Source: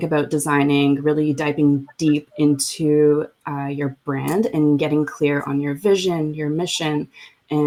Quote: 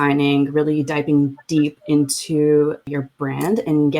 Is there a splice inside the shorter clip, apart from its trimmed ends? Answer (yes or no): yes